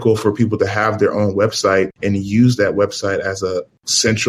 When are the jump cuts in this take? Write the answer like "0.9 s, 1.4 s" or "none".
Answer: none